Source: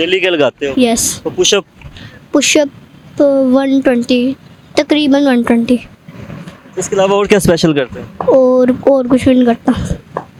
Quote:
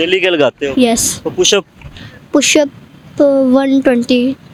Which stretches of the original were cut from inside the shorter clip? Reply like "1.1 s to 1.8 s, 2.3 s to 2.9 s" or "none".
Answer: none